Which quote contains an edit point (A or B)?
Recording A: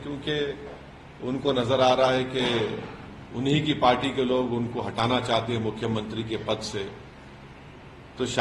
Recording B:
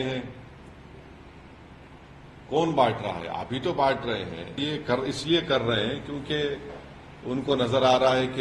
B